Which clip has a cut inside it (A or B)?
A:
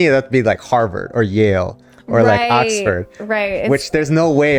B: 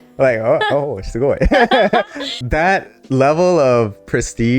B